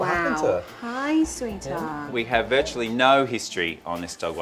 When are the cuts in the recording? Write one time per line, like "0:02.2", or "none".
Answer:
0:02.1

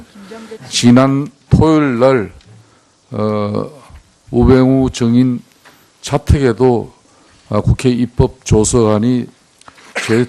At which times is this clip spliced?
none

